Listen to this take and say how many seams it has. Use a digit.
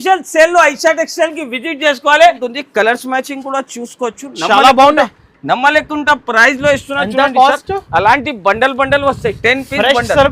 1